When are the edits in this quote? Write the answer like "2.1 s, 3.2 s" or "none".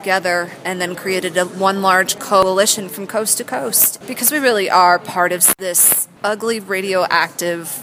2.4 s, 3.9 s, 5.6 s